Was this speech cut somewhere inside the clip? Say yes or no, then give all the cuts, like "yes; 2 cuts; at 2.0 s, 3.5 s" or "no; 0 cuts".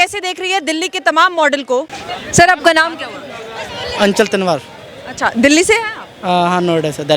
yes; 1 cut; at 1.9 s